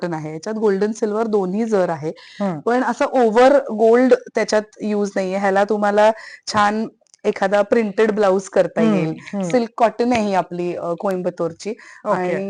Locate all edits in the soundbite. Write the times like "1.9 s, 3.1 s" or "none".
none